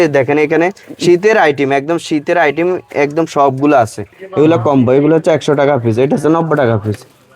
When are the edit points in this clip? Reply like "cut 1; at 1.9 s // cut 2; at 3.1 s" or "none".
cut 1; at 4.1 s